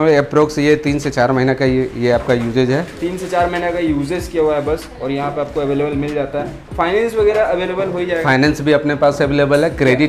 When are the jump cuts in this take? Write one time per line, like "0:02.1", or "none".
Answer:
none

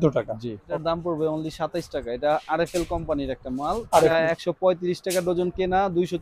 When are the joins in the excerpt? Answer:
0:00.8
0:04.1

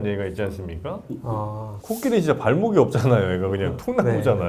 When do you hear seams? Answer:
none

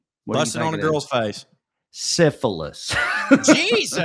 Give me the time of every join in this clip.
none

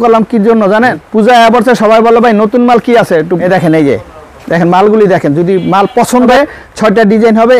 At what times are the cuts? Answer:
0:01.0
0:03.4
0:06.3

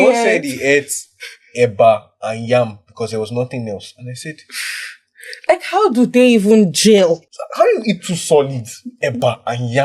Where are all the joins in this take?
0:07.4

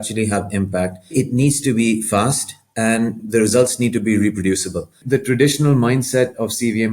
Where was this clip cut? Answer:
0:01.1
0:03.2
0:05.0

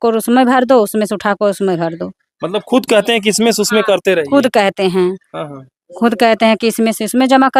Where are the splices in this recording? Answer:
none

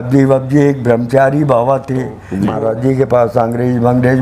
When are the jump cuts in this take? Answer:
0:02.2

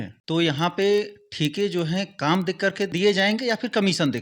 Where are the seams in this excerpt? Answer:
none

